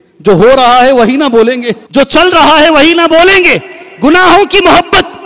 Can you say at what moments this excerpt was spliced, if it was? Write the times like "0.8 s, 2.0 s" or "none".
1.8 s